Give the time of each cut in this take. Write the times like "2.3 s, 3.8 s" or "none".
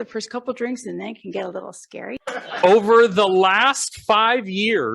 2.2 s